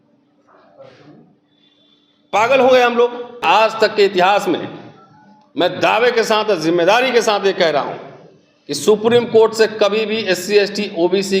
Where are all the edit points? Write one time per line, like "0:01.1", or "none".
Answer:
0:03.4